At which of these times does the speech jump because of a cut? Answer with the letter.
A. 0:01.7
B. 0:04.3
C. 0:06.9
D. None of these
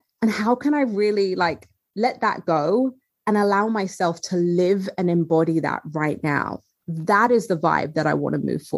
D